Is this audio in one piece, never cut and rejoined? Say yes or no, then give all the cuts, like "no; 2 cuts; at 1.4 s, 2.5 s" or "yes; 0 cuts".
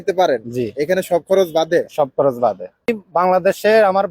no; 1 cut; at 2.9 s